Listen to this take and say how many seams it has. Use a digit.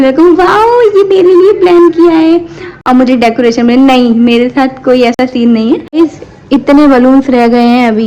1